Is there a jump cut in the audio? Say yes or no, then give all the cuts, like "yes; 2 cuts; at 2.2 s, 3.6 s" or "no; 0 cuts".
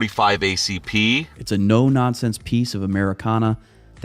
yes; 1 cut; at 1.3 s